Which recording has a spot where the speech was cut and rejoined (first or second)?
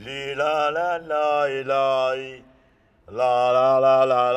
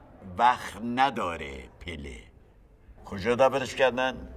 second